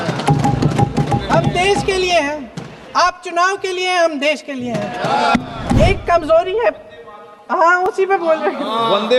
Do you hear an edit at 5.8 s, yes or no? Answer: yes